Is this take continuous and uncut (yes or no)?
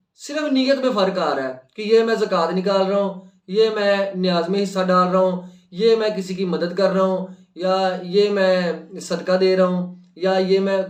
yes